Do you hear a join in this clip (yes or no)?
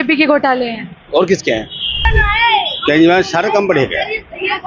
yes